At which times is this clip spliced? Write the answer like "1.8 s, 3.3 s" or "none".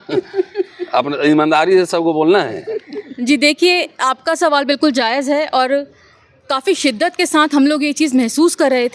none